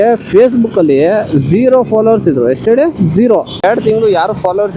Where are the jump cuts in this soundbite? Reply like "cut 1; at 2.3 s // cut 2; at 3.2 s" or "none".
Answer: cut 1; at 3.5 s

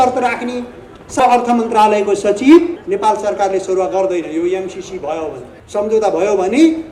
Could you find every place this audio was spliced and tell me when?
cut 1; at 1.2 s // cut 2; at 2.8 s // cut 3; at 5.5 s

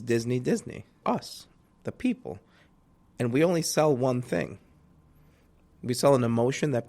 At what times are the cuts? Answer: cut 1; at 1.0 s

